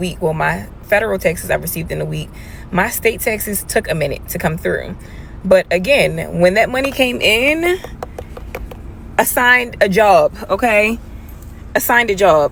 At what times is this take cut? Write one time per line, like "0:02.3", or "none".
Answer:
none